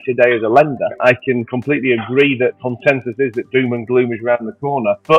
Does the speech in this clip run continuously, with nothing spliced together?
no; 2 cuts; at 0.9 s, 2.6 s

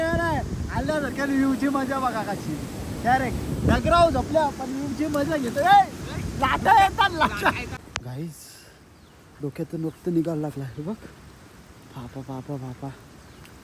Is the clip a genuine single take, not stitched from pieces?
no; 1 cut; at 7.8 s

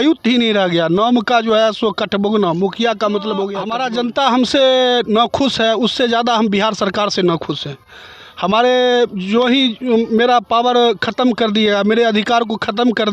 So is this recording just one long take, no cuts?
no; 1 cut; at 3.7 s

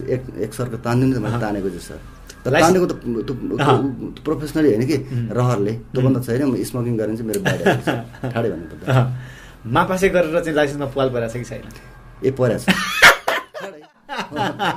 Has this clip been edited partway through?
no; 0 cuts

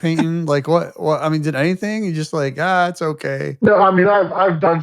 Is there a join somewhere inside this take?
yes; 1 cut; at 3.5 s

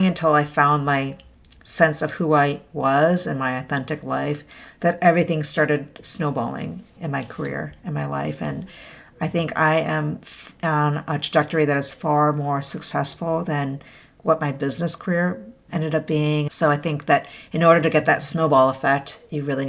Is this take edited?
no; 0 cuts

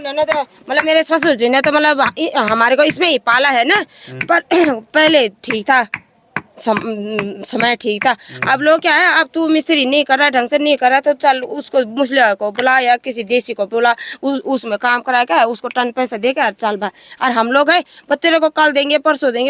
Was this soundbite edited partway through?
no; 0 cuts

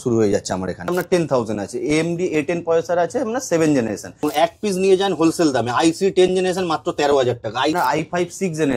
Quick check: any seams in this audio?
yes; 3 cuts; at 1.1 s, 4.2 s, 7.7 s

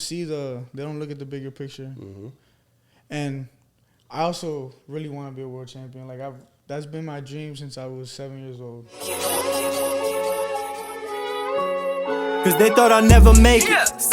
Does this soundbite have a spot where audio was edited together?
yes; 1 cut; at 9.4 s

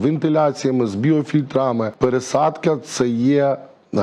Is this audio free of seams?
no; 1 cut; at 1.9 s

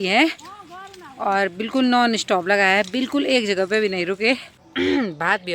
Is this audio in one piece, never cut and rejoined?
no; 1 cut; at 4.6 s

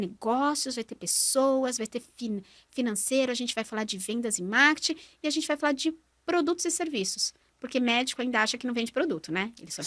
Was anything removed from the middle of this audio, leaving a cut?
no; 0 cuts

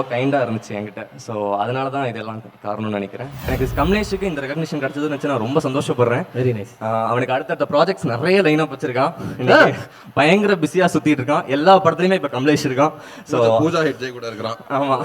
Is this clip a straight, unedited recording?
no; 1 cut; at 3.3 s

